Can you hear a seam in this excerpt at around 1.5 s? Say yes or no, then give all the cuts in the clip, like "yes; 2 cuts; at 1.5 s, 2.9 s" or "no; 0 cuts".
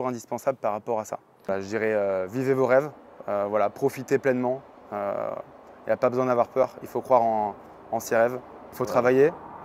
yes; 2 cuts; at 1.5 s, 8.7 s